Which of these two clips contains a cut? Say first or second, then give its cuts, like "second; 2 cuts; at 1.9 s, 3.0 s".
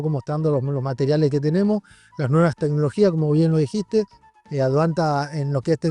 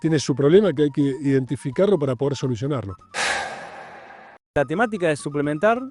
second; 2 cuts; at 3.0 s, 4.5 s